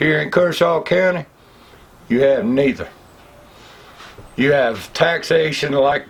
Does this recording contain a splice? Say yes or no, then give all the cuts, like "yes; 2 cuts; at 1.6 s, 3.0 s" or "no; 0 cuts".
no; 0 cuts